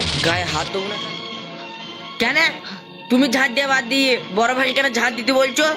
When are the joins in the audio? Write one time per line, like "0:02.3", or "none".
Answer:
0:00.9